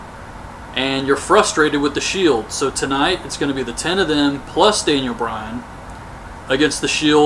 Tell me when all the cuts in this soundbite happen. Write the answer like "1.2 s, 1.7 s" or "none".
6.1 s